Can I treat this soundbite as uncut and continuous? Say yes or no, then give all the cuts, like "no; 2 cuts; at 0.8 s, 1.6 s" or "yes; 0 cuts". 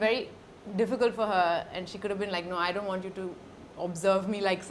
yes; 0 cuts